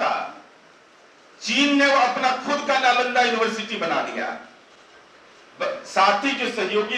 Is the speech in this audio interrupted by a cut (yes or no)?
no